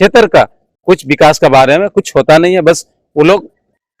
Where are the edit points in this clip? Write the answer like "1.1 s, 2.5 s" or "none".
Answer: none